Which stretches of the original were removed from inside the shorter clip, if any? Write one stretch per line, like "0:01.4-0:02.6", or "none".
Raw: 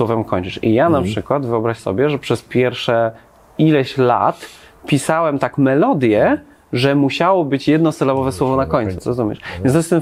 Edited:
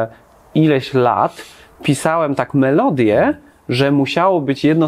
none

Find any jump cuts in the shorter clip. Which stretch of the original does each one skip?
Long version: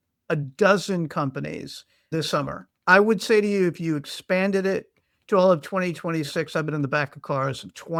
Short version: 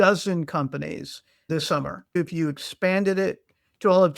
0:02.8-0:03.6

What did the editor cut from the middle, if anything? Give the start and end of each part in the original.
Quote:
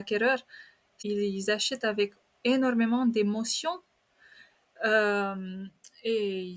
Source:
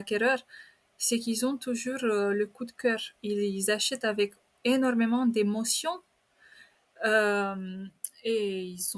0:00.9-0:03.1

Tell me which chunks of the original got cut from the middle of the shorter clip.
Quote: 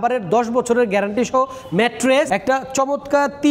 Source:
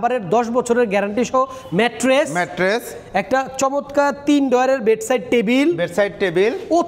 0:02.3-0:03.1

